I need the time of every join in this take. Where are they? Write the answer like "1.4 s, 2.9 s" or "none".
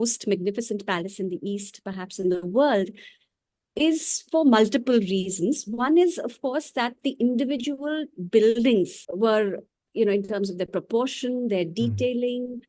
9.0 s